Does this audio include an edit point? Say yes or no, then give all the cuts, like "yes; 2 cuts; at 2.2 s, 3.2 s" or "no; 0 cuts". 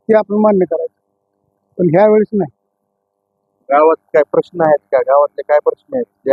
no; 0 cuts